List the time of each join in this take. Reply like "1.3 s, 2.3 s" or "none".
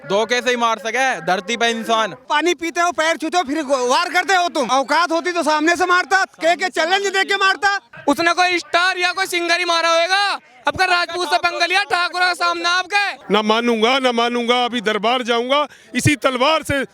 2.2 s, 4.7 s, 7.9 s, 13.1 s